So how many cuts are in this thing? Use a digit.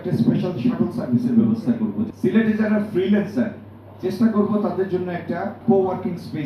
2